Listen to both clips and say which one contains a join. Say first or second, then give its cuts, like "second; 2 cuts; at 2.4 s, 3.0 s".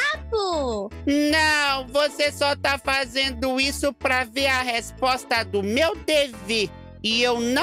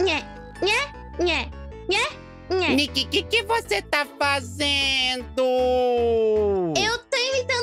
second; 1 cut; at 2.7 s